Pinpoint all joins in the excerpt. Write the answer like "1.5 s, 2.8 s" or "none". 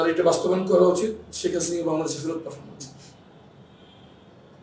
none